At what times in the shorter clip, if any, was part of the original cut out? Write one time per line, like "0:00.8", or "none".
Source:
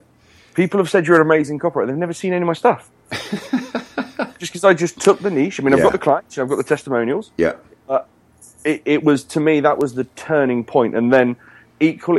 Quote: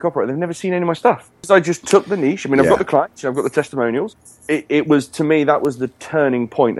0:01.3
0:04.1